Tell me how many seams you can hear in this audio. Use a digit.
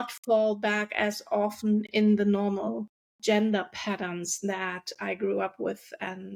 0